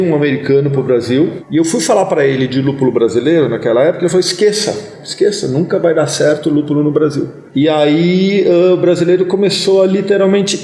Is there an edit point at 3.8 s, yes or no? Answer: no